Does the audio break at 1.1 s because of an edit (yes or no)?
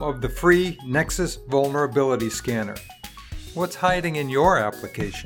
no